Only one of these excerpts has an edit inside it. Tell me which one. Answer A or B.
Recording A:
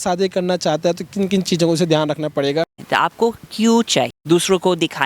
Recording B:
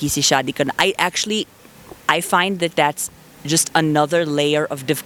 A